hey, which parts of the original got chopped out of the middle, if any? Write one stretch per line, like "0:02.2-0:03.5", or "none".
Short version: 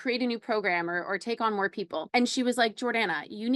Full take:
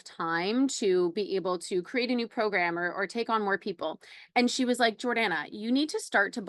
0:03.9-0:04.3